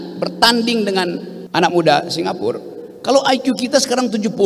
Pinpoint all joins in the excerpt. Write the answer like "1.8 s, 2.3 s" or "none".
1.3 s